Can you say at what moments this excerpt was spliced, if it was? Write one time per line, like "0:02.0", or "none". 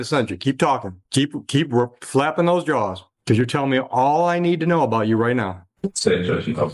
none